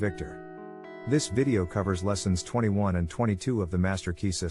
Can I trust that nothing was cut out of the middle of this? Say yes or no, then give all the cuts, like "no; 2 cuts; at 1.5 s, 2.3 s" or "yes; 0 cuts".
no; 1 cut; at 1.0 s